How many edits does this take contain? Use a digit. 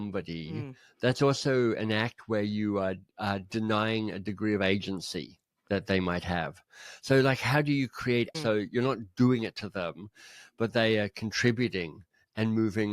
1